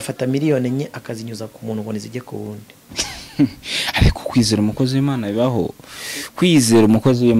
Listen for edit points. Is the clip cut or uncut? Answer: uncut